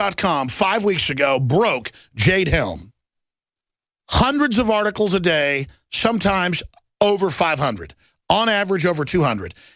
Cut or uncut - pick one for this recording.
uncut